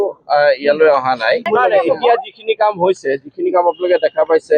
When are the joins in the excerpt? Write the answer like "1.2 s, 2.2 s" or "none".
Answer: 1.4 s